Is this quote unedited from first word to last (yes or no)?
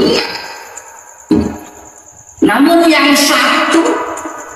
no